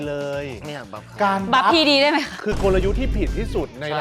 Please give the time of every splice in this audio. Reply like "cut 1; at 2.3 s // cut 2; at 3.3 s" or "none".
none